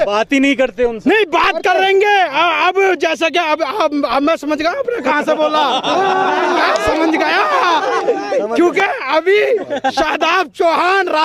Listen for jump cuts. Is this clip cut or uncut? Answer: uncut